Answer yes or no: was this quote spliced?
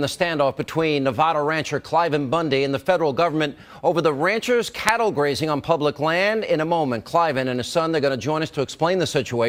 no